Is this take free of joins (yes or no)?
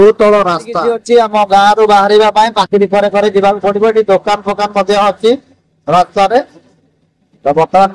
no